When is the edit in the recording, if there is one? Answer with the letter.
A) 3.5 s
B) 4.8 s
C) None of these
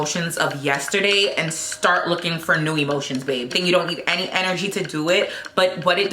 A